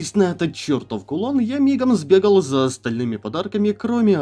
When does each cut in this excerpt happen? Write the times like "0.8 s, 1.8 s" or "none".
none